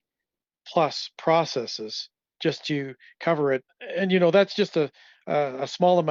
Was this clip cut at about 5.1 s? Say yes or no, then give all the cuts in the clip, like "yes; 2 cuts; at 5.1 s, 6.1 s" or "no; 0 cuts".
no; 2 cuts; at 2.3 s, 3.7 s